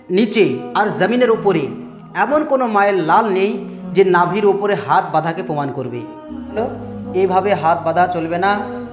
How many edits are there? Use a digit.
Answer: 1